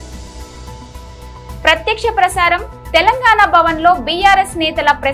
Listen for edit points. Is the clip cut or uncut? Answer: cut